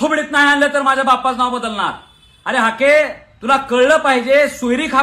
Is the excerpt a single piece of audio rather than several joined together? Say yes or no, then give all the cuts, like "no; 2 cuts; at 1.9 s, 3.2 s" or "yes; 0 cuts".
yes; 0 cuts